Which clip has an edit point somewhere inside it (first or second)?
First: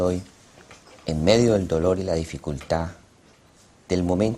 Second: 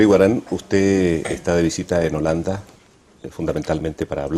first